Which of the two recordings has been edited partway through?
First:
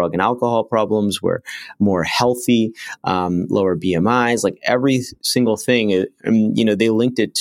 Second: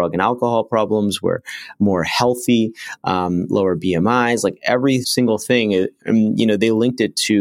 second; 1 cut; at 5.1 s

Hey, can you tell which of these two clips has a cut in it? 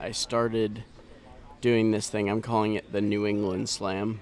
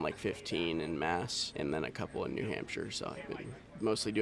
second; 1 cut; at 1.4 s

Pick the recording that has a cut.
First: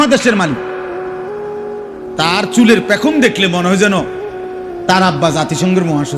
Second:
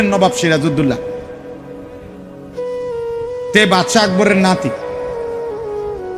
second; 1 cut; at 4.8 s

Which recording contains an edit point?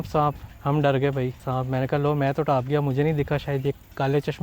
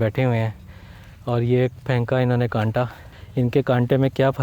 first; 1 cut; at 1.4 s

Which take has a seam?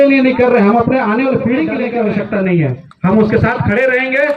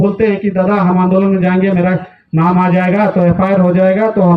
first; 1 cut; at 1.9 s

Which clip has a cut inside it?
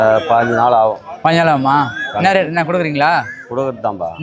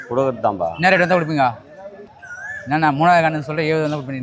second; 1 cut; at 2.1 s

